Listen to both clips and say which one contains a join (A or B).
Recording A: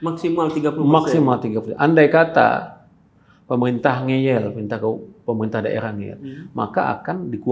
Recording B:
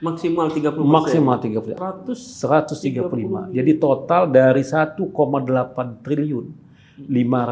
B